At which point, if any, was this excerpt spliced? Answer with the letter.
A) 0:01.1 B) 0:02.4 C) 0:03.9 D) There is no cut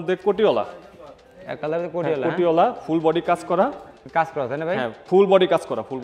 C